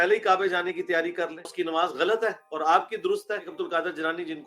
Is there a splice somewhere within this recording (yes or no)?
yes